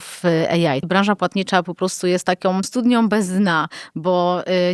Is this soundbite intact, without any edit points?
no; 2 cuts; at 0.8 s, 2.7 s

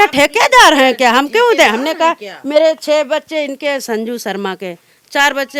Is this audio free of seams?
yes; 0 cuts

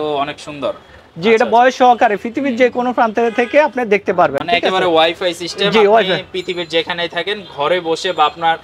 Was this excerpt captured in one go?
yes; 0 cuts

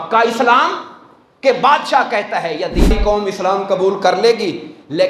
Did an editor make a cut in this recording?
yes; 1 cut; at 2.9 s

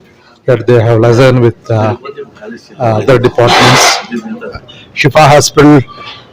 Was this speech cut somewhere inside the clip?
yes; 1 cut; at 4.5 s

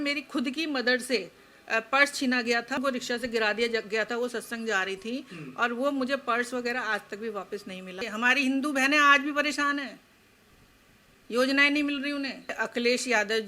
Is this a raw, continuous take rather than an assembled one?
no; 3 cuts; at 2.8 s, 8.0 s, 12.6 s

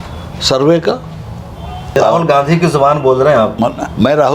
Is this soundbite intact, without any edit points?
no; 1 cut; at 1.9 s

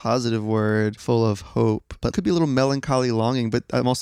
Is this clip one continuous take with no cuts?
yes; 0 cuts

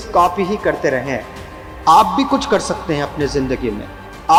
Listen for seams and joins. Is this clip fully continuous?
yes; 0 cuts

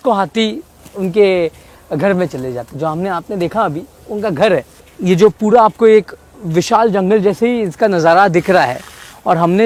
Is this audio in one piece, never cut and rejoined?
yes; 0 cuts

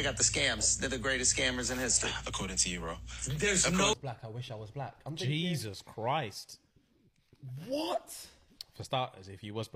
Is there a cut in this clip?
yes; 1 cut; at 3.9 s

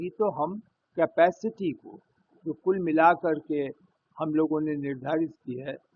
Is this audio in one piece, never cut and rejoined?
yes; 0 cuts

